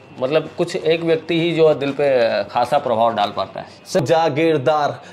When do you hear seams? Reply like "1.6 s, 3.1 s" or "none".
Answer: 4.0 s